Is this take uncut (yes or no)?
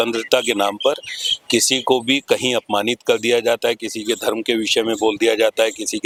yes